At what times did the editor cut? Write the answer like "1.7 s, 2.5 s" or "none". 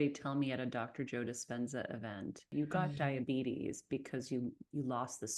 2.5 s